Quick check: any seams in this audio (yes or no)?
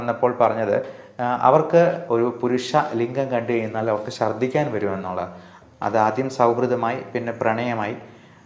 yes